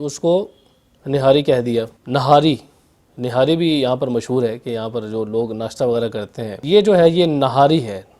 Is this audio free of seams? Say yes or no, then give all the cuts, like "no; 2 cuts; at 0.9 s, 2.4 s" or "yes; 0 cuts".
no; 2 cuts; at 2.0 s, 6.6 s